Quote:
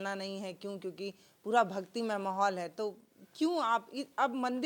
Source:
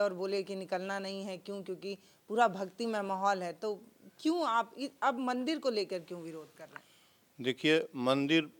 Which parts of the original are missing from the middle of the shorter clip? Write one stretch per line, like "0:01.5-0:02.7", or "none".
none